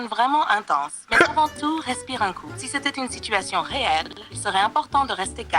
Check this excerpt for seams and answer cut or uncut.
uncut